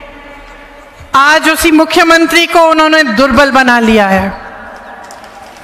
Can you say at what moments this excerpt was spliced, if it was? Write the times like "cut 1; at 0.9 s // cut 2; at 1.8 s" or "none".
none